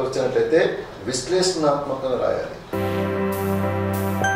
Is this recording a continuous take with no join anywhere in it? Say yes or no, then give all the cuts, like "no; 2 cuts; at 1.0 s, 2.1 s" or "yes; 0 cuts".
no; 1 cut; at 2.8 s